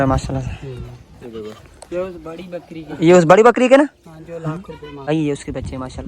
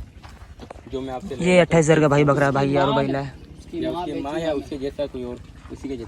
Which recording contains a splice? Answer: first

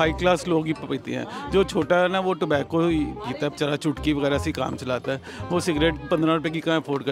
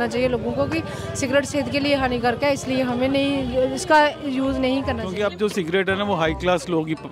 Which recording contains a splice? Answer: second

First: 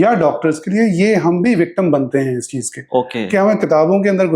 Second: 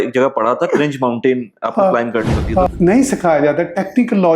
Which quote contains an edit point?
second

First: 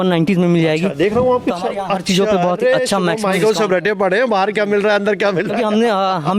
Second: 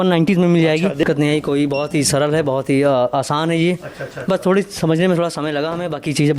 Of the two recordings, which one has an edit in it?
second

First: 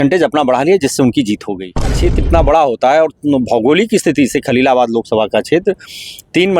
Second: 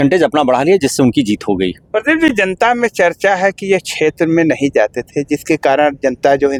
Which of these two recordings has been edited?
first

